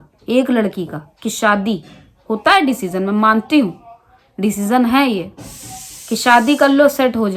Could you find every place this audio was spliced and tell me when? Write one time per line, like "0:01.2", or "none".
none